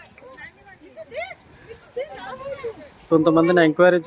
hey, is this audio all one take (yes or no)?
no